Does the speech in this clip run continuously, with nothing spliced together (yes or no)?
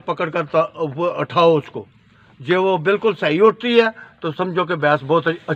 yes